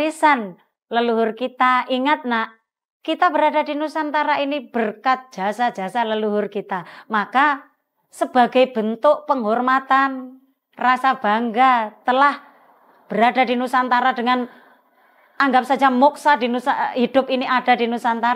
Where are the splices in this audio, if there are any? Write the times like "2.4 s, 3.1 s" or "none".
none